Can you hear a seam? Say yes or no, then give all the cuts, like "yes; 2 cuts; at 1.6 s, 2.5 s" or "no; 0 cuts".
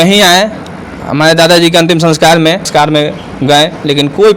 yes; 1 cut; at 2.7 s